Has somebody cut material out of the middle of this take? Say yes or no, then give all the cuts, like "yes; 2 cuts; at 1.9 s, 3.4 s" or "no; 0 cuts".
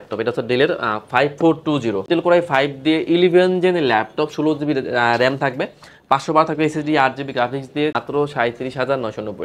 yes; 2 cuts; at 2.1 s, 8.0 s